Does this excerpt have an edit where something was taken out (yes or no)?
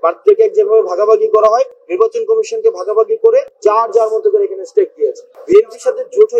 yes